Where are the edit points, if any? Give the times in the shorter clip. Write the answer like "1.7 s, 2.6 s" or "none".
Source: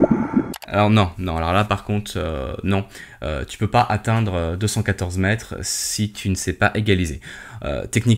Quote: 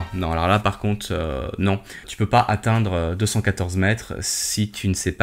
2.1 s